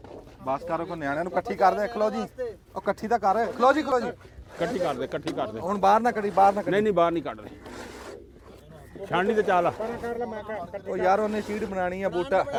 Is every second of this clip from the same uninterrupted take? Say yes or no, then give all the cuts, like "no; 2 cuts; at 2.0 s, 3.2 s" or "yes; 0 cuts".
yes; 0 cuts